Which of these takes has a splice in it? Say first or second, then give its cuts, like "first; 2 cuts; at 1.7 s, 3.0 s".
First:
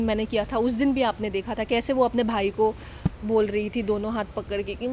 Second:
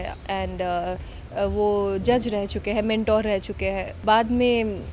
second; 1 cut; at 3.9 s